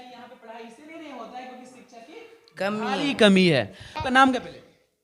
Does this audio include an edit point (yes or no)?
yes